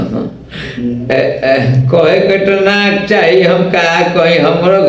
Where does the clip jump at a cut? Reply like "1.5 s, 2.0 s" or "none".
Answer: none